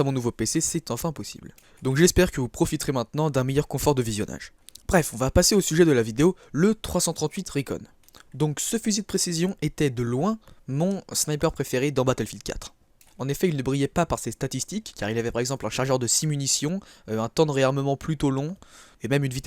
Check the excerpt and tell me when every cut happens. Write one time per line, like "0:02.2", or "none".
0:17.6